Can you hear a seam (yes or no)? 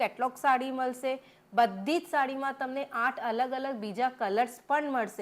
no